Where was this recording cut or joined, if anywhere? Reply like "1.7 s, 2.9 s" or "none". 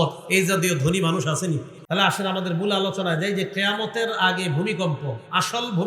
1.7 s